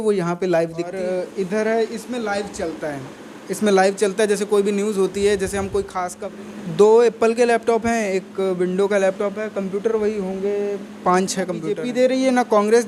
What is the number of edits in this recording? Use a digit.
3